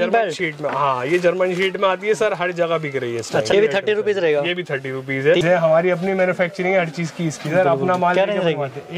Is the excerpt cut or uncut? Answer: cut